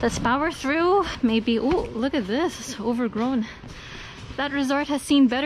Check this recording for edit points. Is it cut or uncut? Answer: cut